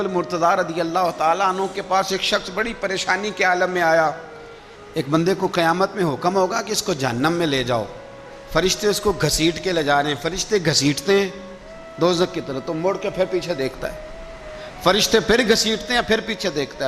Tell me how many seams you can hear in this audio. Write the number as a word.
one